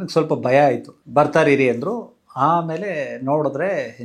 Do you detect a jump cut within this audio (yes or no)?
yes